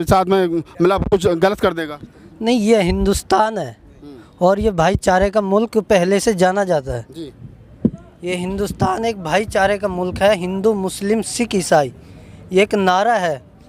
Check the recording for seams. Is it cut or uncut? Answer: uncut